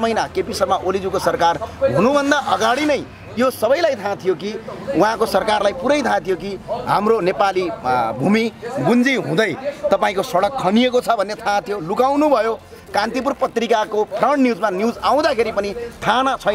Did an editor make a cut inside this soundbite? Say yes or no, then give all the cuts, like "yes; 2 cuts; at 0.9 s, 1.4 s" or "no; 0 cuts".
no; 0 cuts